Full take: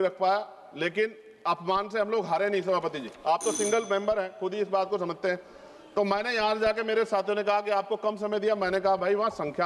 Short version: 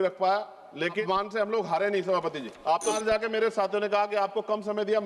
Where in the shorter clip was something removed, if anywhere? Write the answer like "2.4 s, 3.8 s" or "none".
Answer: 1.0 s, 3.0 s